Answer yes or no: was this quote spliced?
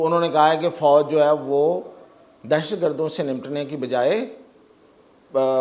no